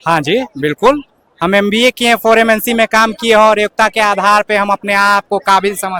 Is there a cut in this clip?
no; 0 cuts

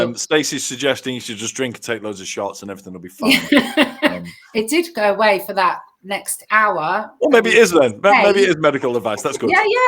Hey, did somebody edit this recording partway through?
no; 0 cuts

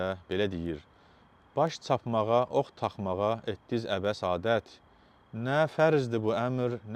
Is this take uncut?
yes; 0 cuts

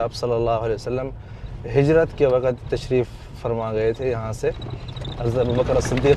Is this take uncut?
yes; 0 cuts

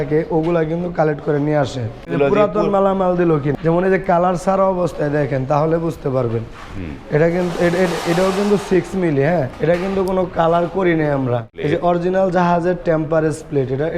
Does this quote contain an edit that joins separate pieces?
yes; 4 cuts; at 2.1 s, 3.5 s, 9.5 s, 11.5 s

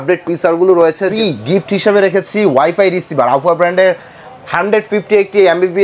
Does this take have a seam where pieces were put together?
yes; 1 cut; at 1.1 s

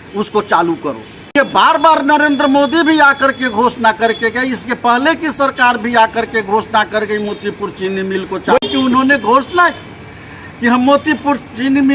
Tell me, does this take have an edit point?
yes; 2 cuts; at 1.3 s, 8.6 s

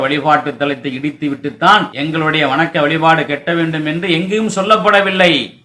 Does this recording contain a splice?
yes; 1 cut; at 1.9 s

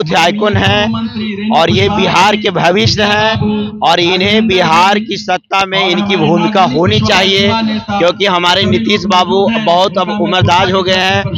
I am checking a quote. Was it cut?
no; 0 cuts

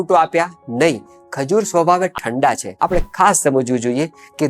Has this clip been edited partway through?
yes; 1 cut; at 2.7 s

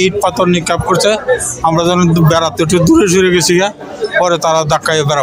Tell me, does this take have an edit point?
no; 0 cuts

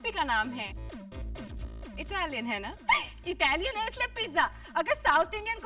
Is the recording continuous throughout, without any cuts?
yes; 0 cuts

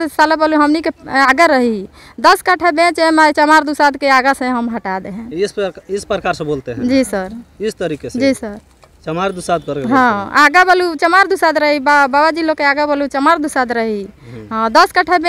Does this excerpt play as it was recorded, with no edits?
yes; 0 cuts

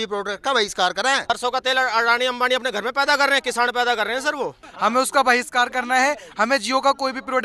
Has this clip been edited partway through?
yes; 2 cuts; at 1.3 s, 4.7 s

